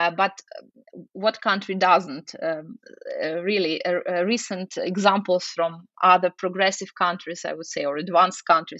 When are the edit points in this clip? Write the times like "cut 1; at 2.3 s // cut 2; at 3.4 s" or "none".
none